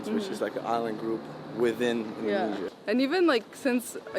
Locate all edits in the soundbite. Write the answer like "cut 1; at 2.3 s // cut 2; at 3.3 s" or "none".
cut 1; at 2.7 s